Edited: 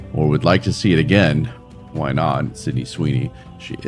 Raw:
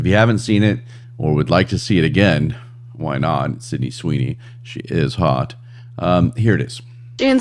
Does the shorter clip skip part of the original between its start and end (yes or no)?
no